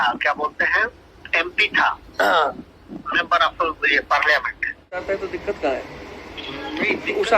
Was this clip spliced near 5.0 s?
yes; 1 cut; at 5.0 s

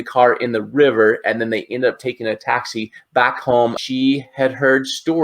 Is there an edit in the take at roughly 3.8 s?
yes; 1 cut; at 3.8 s

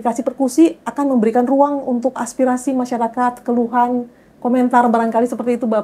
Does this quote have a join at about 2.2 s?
yes; 1 cut; at 2.2 s

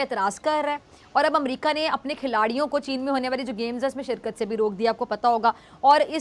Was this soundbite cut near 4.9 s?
no; 0 cuts

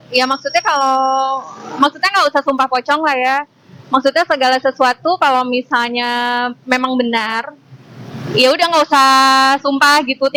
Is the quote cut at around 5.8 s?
no; 0 cuts

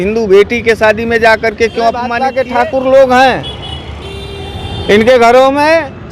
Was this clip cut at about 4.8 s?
no; 1 cut; at 2.3 s

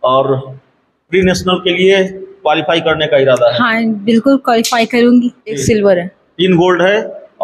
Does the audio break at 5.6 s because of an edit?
yes; 1 cut; at 5.6 s

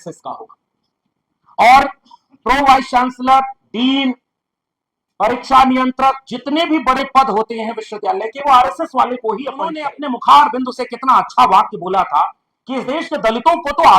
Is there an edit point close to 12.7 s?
no; 1 cut; at 10.0 s

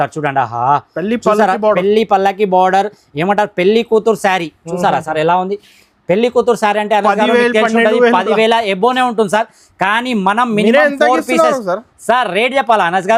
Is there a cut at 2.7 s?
no; 0 cuts

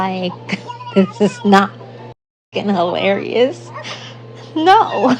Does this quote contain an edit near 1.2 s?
no; 1 cut; at 2.5 s

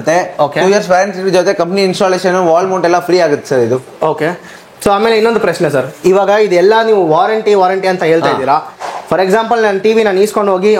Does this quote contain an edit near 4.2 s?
no; 0 cuts

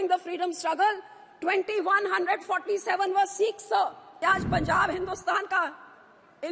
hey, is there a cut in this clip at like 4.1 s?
yes; 1 cut; at 4.1 s

